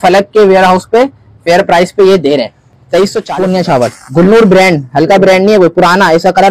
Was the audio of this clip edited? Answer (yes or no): yes